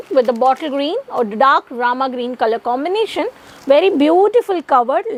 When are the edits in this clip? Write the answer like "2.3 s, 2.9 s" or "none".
none